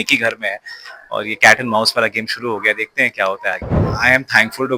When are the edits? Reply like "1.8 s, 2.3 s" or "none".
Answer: 3.8 s